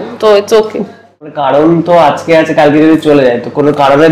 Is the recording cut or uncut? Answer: cut